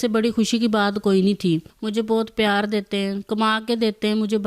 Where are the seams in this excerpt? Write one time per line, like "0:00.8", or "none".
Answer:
0:01.8